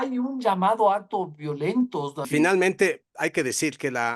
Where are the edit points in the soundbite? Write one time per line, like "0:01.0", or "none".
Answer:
0:02.2

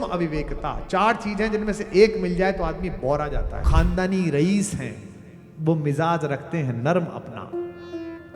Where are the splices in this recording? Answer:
0:03.7

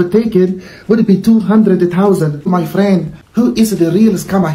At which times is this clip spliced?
0:02.7

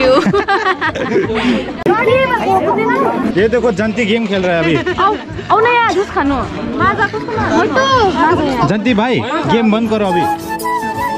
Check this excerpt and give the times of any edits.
none

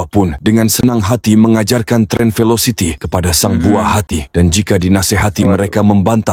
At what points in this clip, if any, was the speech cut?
none

